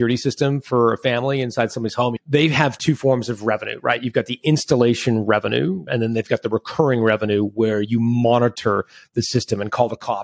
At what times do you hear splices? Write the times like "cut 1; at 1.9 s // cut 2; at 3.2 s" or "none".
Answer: cut 1; at 2.2 s // cut 2; at 5.8 s